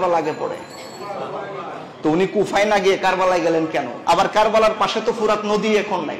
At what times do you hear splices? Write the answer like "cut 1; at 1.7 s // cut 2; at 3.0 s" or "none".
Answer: cut 1; at 3.9 s